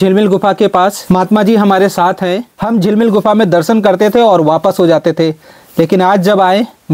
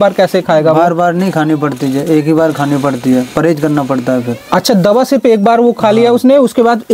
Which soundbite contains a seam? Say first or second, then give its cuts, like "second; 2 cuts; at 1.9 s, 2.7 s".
first; 2 cuts; at 1.0 s, 2.5 s